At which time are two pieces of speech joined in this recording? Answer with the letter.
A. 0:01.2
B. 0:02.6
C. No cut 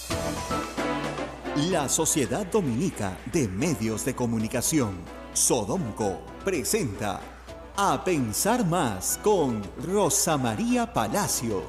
A